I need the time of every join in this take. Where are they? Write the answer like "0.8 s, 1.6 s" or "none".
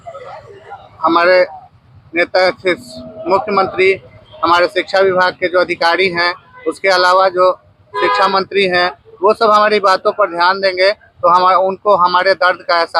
none